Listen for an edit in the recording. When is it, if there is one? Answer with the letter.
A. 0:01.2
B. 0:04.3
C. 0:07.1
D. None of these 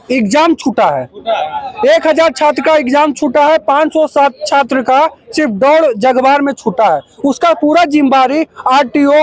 D